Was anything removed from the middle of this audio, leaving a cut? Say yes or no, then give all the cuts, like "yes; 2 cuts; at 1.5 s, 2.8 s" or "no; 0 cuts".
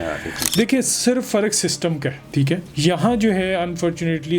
yes; 1 cut; at 2.7 s